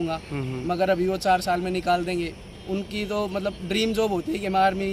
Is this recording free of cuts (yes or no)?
yes